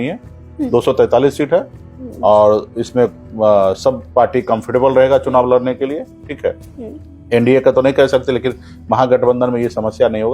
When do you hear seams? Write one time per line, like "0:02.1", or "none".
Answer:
none